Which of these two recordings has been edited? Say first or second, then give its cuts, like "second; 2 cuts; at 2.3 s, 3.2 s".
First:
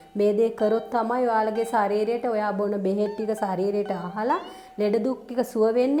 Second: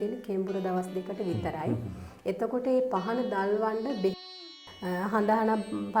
second; 1 cut; at 4.4 s